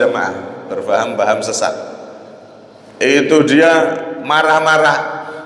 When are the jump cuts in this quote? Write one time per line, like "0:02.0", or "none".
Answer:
none